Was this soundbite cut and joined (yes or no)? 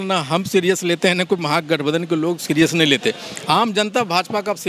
no